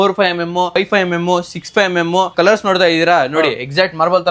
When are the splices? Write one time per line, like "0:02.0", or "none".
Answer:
0:00.8
0:02.3